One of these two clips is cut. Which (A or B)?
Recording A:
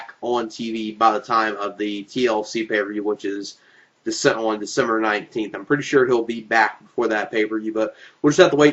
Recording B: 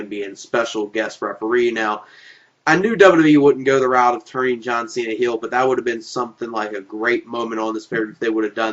B